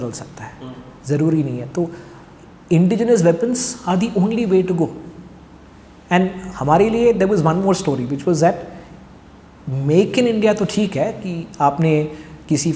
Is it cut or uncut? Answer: uncut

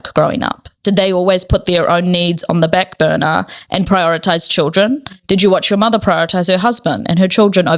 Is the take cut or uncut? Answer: uncut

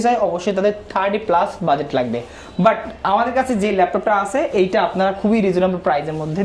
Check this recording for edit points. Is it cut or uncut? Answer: uncut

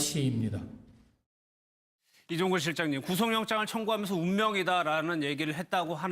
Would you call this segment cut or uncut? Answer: uncut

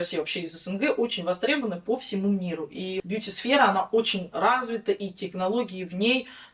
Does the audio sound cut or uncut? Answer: cut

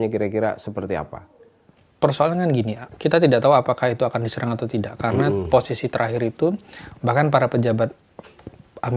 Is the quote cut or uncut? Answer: uncut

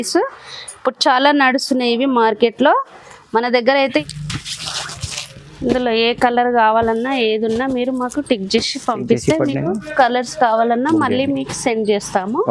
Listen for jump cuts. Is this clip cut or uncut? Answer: cut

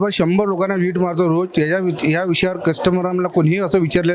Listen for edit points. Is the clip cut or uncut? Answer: uncut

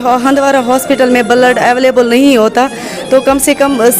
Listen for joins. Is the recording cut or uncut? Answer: uncut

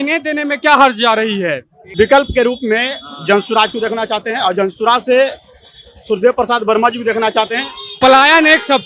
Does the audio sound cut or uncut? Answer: cut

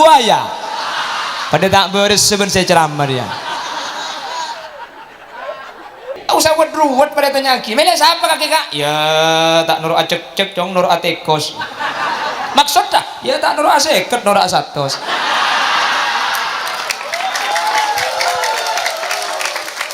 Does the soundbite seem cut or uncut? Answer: cut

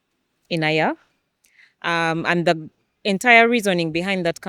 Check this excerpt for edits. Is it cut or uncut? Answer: uncut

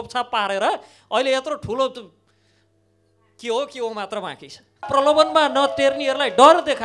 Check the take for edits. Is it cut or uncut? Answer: cut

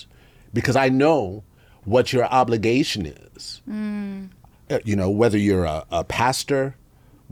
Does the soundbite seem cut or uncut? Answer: uncut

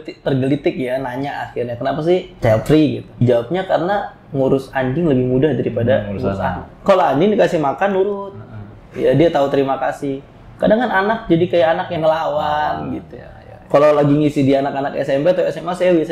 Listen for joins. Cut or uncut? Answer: cut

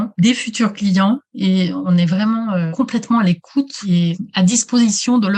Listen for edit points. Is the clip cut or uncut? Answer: uncut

